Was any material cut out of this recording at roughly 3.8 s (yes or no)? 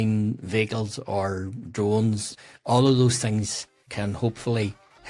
yes